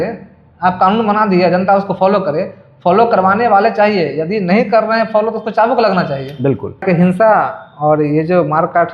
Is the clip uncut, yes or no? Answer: no